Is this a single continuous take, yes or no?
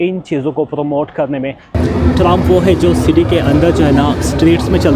no